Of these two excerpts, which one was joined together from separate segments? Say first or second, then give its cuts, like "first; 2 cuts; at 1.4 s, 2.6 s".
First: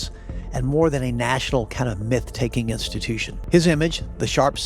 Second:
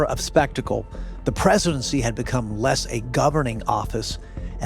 first; 1 cut; at 3.3 s